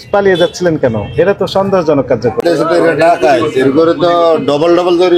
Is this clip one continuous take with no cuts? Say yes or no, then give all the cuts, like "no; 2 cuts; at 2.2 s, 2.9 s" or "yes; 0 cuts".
no; 1 cut; at 2.4 s